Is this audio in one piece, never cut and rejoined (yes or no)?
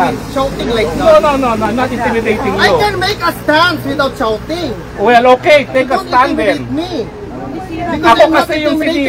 yes